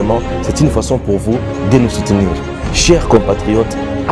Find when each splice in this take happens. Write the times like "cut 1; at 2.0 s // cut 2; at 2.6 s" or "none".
none